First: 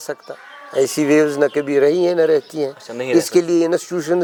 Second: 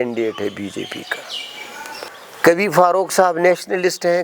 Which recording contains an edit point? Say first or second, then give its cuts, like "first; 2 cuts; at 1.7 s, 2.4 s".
second; 1 cut; at 2.0 s